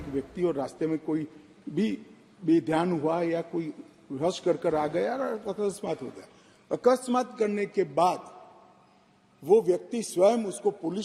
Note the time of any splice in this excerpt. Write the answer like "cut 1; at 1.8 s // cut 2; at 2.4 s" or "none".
none